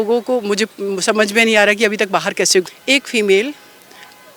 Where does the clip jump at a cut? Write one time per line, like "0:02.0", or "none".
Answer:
0:02.7